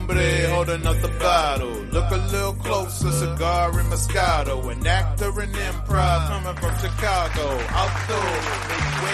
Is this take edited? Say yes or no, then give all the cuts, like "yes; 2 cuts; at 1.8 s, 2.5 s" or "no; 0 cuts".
no; 0 cuts